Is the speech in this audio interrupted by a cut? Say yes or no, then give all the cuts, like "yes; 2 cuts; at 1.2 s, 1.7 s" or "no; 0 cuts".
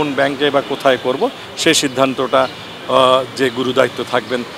no; 0 cuts